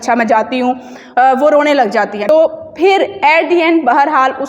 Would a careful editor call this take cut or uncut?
cut